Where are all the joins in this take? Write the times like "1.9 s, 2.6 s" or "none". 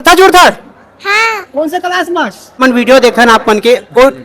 2.6 s